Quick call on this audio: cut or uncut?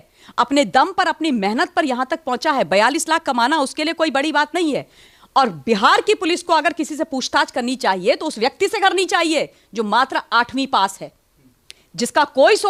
uncut